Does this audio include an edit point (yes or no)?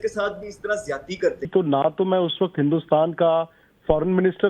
yes